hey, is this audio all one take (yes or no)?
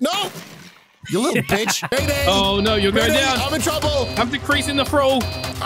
no